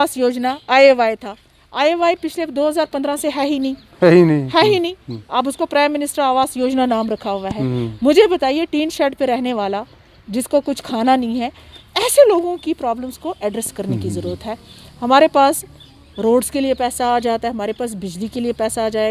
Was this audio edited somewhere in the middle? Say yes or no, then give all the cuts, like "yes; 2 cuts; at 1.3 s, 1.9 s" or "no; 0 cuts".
no; 0 cuts